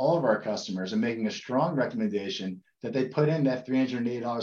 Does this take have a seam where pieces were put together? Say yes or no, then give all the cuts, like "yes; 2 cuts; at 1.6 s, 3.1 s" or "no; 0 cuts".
no; 0 cuts